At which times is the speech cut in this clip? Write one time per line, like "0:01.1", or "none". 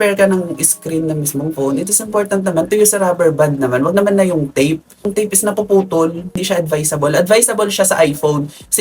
0:05.1
0:06.4